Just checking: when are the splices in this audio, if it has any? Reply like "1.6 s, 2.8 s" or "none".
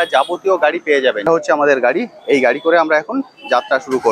1.2 s